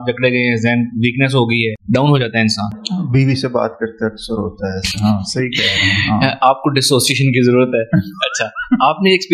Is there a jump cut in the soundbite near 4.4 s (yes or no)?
no